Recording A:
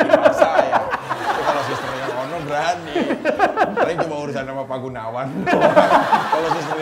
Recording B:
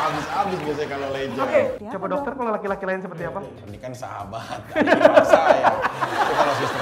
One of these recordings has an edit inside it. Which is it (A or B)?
B